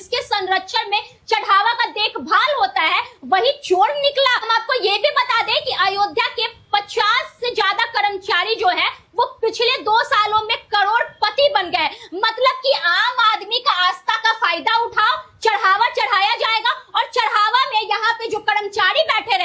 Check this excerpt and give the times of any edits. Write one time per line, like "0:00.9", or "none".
none